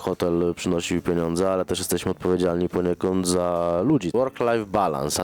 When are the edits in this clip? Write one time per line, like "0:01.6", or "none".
0:04.1